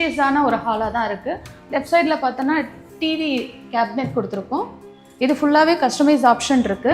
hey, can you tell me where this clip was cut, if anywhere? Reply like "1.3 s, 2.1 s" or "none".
4.8 s